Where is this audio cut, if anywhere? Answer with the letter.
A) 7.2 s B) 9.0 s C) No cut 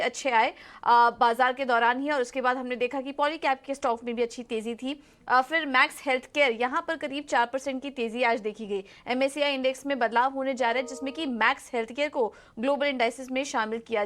A